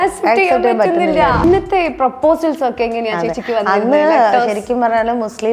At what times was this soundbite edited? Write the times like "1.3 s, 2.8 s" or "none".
1.4 s